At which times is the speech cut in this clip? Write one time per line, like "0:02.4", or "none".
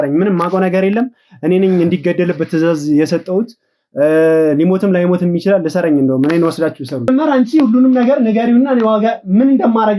0:07.1